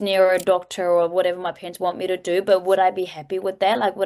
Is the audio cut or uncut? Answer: uncut